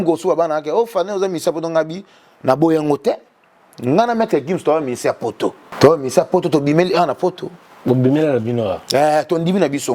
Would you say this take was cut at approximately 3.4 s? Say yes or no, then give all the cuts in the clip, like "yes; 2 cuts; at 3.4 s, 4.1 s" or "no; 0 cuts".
no; 1 cut; at 5.7 s